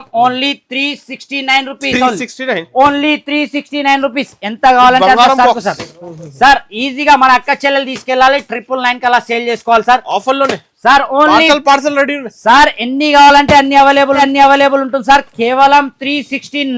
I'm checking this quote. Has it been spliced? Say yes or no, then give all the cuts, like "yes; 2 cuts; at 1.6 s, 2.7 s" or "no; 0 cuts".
no; 0 cuts